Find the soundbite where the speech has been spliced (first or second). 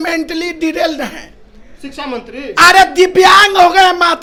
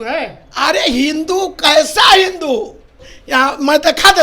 second